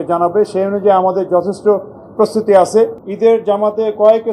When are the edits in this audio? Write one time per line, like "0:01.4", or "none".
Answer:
0:03.0